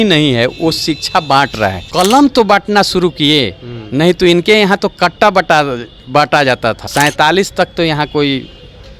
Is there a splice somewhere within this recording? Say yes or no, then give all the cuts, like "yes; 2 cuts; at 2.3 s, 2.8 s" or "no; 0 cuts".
yes; 2 cuts; at 1.8 s, 6.9 s